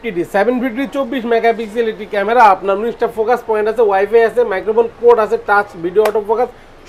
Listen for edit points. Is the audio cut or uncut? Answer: uncut